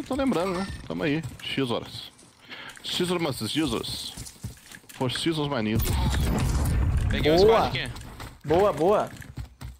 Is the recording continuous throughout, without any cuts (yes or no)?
yes